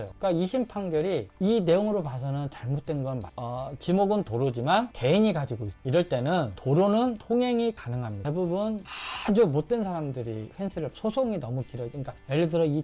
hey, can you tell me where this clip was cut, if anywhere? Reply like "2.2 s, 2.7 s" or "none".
3.3 s, 8.2 s